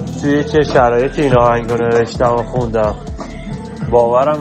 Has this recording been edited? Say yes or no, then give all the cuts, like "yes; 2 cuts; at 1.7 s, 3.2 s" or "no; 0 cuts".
no; 0 cuts